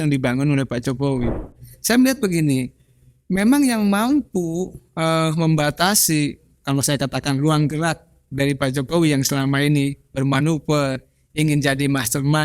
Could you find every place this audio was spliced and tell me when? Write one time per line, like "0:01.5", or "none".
0:01.6

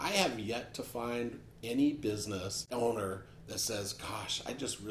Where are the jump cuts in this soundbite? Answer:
0:02.7

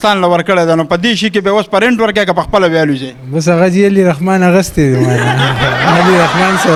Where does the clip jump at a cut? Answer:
none

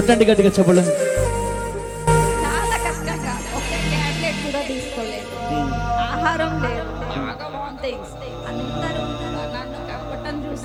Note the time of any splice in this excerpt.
none

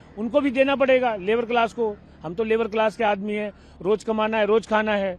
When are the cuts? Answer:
none

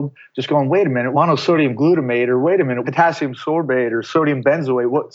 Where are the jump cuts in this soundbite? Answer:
0:01.1
0:02.8

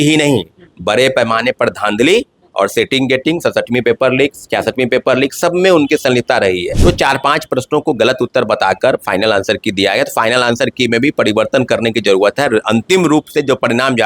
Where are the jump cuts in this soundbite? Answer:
0:06.7

